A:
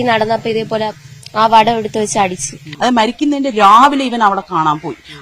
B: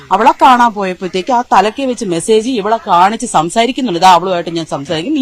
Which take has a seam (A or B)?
A